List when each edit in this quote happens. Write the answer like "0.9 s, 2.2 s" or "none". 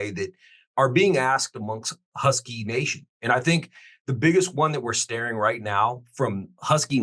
none